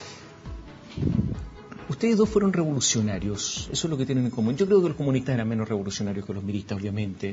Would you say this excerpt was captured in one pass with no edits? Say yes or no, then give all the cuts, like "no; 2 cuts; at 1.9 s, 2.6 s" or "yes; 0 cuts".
no; 1 cut; at 3.1 s